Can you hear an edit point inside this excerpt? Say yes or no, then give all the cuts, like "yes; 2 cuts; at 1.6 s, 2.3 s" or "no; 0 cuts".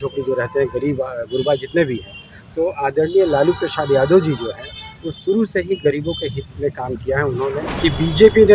yes; 1 cut; at 7.7 s